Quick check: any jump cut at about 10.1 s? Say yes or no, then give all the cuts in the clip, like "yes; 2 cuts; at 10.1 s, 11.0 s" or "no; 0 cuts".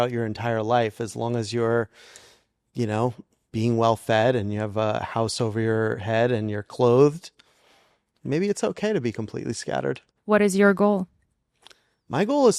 yes; 1 cut; at 10.1 s